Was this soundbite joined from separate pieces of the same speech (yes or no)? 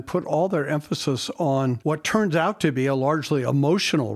yes